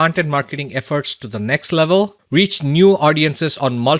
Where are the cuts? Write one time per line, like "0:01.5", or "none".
0:02.2